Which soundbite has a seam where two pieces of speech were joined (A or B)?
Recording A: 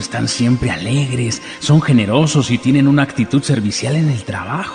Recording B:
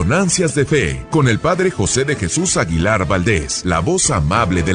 B